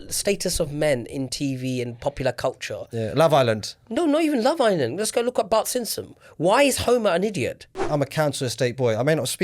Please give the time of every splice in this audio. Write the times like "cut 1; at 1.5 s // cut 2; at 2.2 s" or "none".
cut 1; at 7.8 s